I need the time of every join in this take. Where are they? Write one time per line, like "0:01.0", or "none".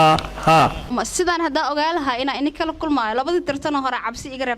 0:00.9